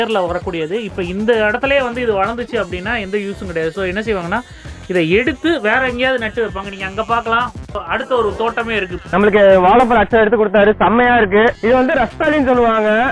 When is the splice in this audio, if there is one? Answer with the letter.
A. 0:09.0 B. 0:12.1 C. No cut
C